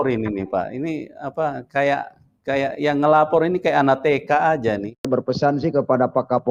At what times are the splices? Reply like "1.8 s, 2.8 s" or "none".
5.1 s